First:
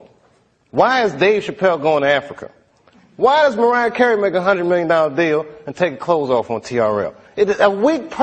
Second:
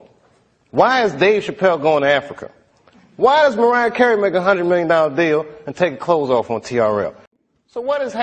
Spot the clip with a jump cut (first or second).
second